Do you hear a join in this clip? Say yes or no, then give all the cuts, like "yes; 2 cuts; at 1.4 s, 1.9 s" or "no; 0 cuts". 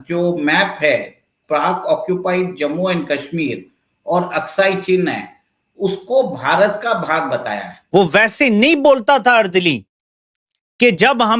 yes; 1 cut; at 7.7 s